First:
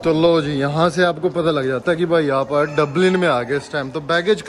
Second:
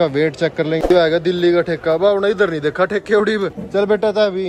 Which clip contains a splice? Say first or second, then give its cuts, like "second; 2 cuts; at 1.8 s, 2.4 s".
second; 2 cuts; at 0.9 s, 3.6 s